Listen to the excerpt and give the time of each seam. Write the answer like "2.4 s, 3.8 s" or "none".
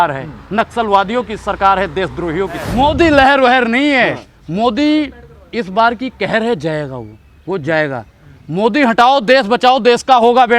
2.7 s